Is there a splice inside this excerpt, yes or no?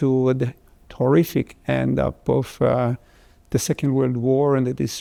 no